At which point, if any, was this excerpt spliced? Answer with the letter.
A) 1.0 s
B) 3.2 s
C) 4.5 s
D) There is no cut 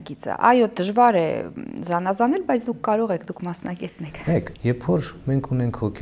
C